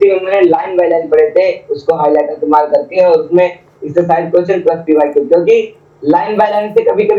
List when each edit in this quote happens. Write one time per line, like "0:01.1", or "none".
none